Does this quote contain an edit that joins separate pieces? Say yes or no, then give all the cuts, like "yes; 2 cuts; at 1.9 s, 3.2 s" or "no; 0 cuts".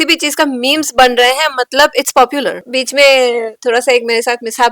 yes; 1 cut; at 2.6 s